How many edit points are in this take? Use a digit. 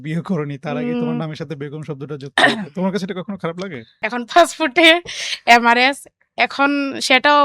1